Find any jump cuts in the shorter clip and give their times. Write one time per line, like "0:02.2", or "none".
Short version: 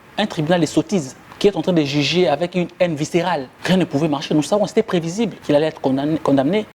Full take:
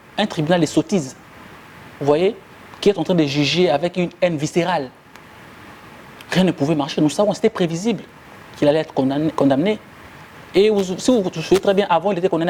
0:01.2
0:03.5
0:05.4